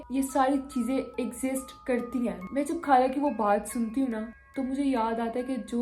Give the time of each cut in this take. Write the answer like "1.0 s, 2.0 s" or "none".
none